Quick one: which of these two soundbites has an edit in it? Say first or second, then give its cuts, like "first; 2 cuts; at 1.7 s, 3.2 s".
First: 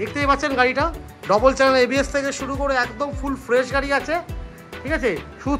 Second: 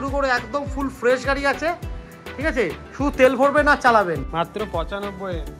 second; 1 cut; at 4.2 s